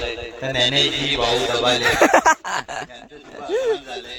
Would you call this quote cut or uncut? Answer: uncut